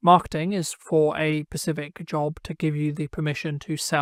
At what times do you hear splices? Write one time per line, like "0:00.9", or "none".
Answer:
none